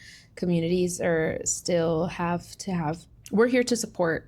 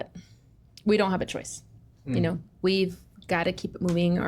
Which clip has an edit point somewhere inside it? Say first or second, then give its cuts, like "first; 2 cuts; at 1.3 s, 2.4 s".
first; 1 cut; at 3.1 s